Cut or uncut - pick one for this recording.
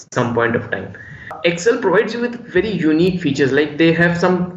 cut